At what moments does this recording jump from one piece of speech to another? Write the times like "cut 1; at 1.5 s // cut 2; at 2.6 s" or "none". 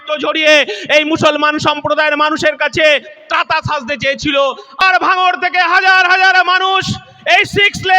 cut 1; at 4.8 s